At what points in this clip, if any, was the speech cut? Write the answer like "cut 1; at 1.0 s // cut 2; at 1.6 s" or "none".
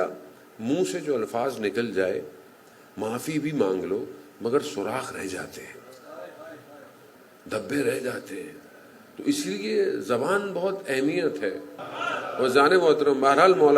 cut 1; at 11.7 s